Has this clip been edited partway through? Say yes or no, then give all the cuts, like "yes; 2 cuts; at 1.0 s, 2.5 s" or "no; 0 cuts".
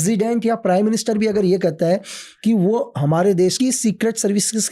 yes; 1 cut; at 3.6 s